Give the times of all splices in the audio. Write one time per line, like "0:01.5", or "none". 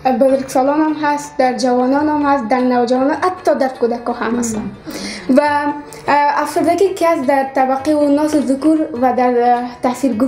none